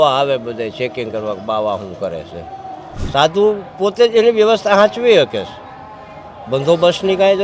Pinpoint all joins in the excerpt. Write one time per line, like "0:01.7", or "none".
0:02.9